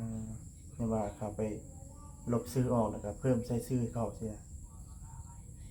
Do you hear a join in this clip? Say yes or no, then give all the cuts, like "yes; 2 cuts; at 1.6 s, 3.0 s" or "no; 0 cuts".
no; 0 cuts